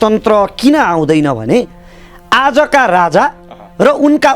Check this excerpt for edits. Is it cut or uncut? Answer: uncut